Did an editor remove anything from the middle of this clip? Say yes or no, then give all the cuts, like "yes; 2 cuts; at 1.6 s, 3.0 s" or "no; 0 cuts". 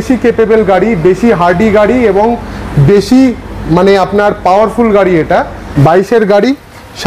yes; 1 cut; at 5.6 s